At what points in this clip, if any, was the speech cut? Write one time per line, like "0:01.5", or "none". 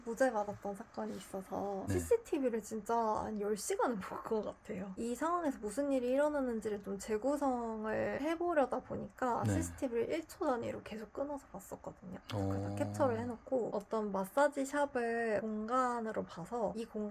0:01.9
0:13.7